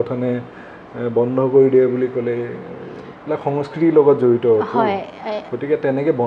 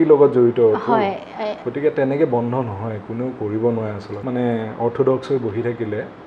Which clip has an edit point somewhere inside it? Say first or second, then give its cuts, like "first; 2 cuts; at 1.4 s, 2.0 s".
second; 1 cut; at 4.1 s